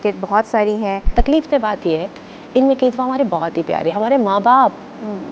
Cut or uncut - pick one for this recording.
cut